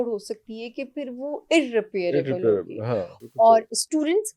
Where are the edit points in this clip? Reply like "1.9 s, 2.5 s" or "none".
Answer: 3.1 s